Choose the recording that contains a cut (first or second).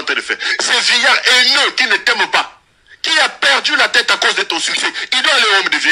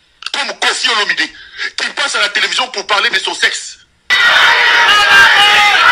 second